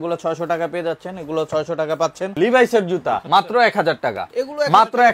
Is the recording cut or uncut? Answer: cut